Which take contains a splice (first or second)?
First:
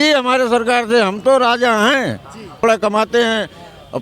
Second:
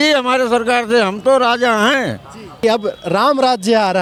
first